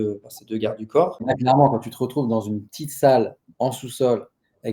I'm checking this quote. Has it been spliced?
yes; 1 cut; at 1.2 s

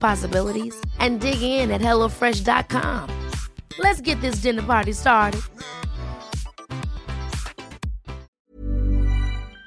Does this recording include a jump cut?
yes; 1 cut; at 8.3 s

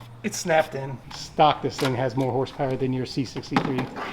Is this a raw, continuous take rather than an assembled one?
no; 1 cut; at 1.0 s

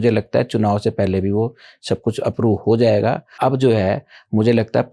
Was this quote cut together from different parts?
yes; 1 cut; at 3.4 s

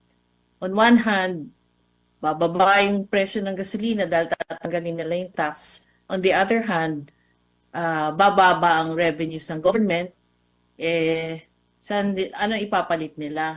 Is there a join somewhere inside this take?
no; 0 cuts

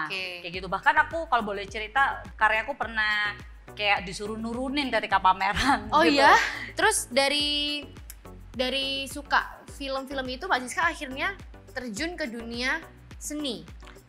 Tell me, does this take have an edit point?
yes; 2 cuts; at 2.3 s, 6.6 s

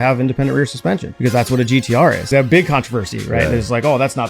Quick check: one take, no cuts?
no; 2 cuts; at 1.1 s, 2.2 s

